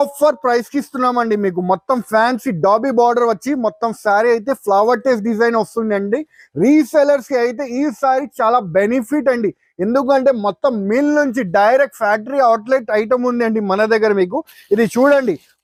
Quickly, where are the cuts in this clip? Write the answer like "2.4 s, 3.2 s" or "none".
none